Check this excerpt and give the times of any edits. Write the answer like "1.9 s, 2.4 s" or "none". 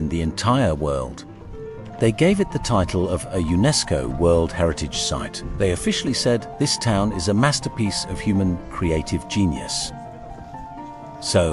none